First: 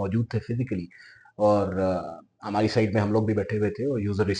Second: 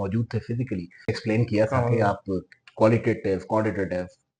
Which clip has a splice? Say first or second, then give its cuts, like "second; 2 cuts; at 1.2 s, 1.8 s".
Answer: second; 1 cut; at 1.2 s